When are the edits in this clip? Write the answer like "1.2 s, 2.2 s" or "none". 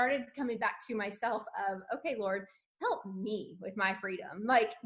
none